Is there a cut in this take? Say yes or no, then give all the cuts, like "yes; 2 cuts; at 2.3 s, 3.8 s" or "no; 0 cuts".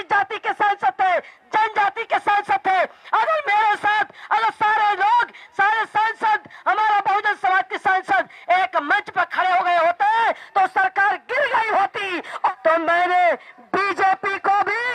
yes; 1 cut; at 12.5 s